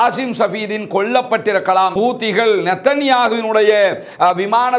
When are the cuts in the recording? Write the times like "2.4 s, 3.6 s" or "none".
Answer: 1.9 s